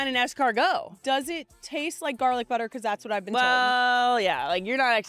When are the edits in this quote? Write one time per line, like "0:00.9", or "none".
0:00.9

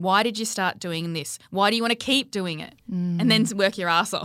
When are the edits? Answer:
none

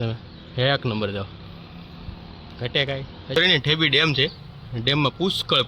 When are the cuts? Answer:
0:03.4

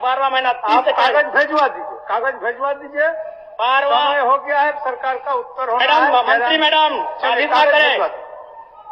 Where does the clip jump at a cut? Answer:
none

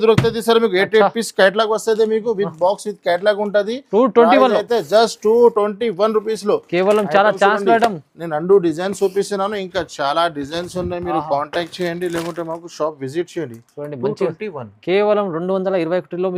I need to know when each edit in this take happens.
none

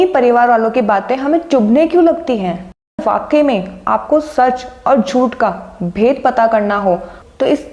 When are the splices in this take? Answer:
0:03.0

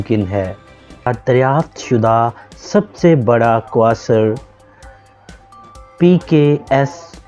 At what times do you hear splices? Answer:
0:01.1

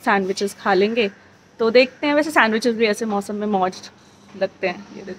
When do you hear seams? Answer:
none

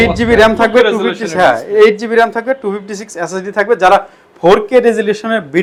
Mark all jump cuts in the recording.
none

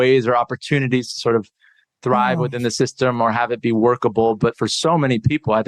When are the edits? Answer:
none

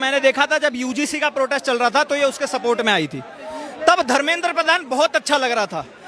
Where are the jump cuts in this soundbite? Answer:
none

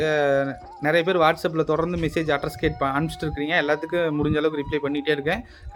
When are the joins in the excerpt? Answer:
none

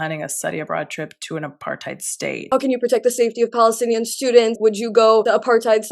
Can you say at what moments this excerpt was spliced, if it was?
0:02.4
0:05.0

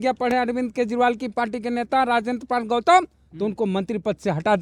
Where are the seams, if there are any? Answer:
none

